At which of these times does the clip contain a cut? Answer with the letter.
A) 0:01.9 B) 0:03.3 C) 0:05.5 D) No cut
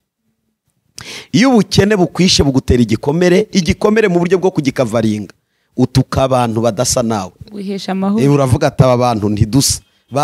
D